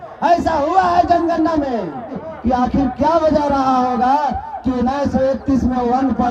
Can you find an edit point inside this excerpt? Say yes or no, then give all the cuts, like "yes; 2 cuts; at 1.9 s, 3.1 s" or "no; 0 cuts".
yes; 1 cut; at 2.3 s